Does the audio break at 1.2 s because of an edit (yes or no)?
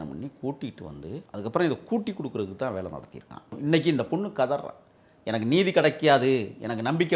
yes